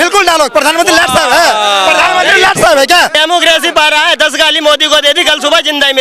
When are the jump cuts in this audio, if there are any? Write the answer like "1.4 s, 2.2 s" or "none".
3.1 s